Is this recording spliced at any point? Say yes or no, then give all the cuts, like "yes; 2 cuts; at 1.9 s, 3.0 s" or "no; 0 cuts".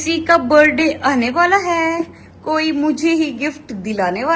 no; 0 cuts